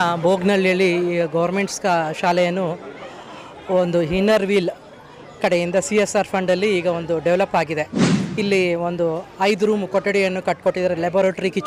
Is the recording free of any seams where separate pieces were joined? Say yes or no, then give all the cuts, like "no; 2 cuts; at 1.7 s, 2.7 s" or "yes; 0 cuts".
yes; 0 cuts